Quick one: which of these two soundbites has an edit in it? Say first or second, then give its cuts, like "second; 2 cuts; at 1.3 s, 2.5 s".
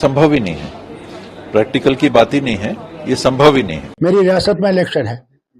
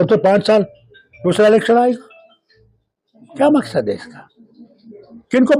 first; 1 cut; at 4.1 s